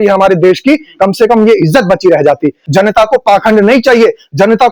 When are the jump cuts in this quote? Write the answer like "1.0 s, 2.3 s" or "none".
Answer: 2.6 s